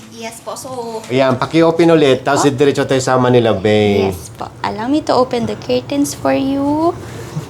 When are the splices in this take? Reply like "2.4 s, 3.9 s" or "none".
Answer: 1.1 s